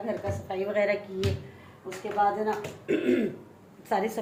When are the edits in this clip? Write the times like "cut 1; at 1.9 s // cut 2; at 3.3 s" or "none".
none